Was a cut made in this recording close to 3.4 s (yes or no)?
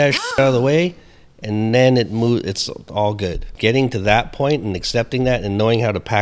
yes